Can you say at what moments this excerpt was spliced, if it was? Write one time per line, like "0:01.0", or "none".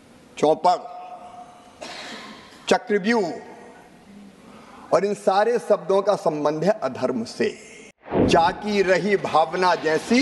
0:08.3

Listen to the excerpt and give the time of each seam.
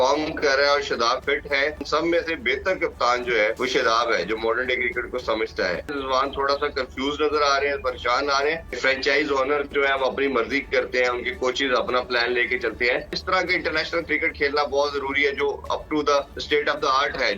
0:01.8
0:03.6
0:06.0
0:08.8
0:13.2
0:16.4

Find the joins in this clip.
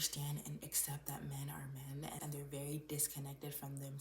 0:02.2

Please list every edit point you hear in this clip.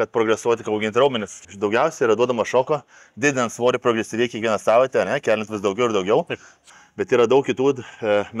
0:01.4
0:06.5

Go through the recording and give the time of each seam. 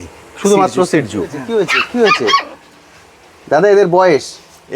0:01.4

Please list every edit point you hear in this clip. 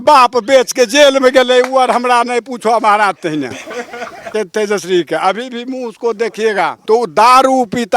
0:04.3
0:06.8

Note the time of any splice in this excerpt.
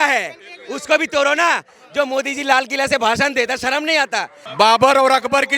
0:04.4

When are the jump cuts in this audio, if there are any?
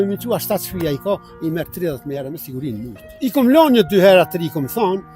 0:03.1

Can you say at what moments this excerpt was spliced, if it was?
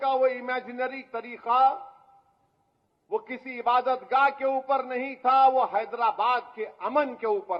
none

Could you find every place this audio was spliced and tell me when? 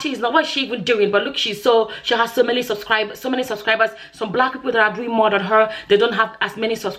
none

